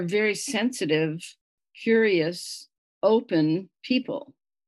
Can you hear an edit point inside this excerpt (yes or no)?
no